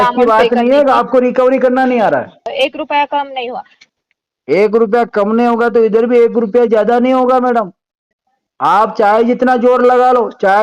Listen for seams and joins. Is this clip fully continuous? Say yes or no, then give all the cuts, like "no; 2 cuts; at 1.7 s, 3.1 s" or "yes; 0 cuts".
no; 1 cut; at 2.5 s